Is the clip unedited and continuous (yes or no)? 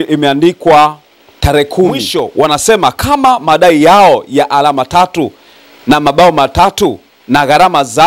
no